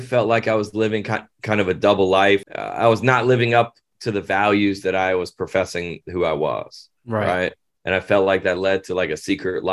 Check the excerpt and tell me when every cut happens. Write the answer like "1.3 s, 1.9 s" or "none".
2.4 s